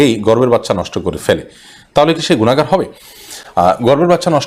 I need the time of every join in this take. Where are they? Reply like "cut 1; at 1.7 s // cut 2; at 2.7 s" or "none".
none